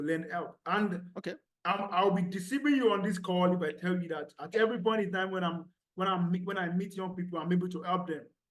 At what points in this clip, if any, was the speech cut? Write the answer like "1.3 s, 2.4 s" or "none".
none